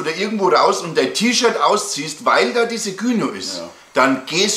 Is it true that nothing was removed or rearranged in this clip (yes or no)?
yes